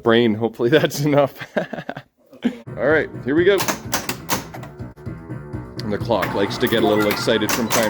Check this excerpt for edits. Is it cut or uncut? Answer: cut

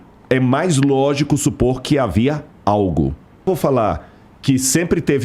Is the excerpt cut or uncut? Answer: cut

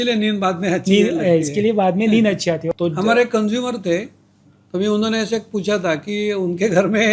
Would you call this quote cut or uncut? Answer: cut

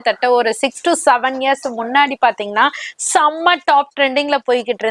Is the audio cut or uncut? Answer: uncut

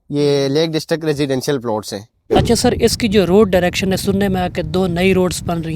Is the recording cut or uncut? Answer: cut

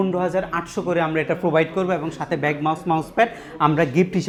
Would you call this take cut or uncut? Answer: uncut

